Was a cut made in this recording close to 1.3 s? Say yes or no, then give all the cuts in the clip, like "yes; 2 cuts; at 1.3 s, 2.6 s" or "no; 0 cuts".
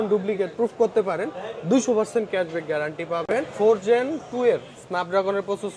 no; 1 cut; at 3.5 s